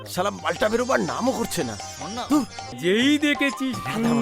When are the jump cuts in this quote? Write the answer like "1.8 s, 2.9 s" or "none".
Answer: 2.6 s